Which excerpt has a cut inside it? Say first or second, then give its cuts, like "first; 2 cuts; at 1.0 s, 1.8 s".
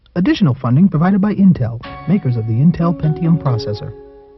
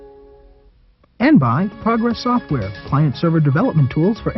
second; 1 cut; at 1.2 s